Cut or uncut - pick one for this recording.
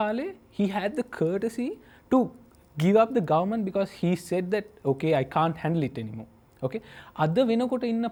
uncut